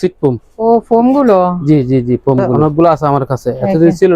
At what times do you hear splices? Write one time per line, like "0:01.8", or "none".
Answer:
0:02.5